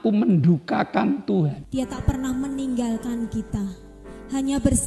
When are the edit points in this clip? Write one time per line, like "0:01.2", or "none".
0:01.6